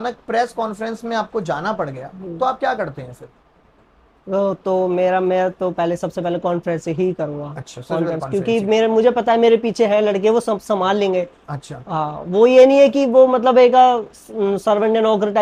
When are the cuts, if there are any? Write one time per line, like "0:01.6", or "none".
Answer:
none